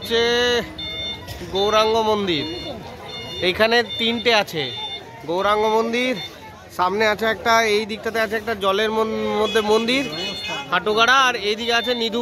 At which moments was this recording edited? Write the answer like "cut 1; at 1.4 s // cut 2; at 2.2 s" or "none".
none